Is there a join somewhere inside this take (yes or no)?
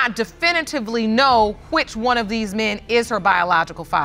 no